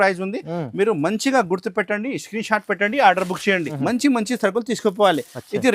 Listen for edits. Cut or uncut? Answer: cut